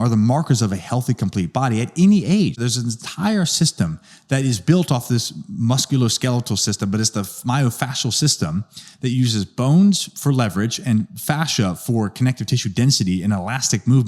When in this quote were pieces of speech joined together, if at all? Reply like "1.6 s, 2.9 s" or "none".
2.6 s